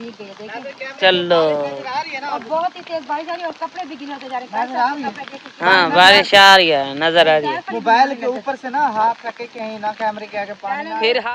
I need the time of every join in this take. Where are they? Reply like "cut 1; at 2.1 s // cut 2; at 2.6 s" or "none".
none